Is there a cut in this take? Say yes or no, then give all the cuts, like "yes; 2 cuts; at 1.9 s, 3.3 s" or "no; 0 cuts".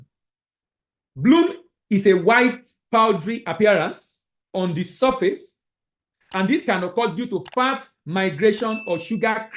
no; 0 cuts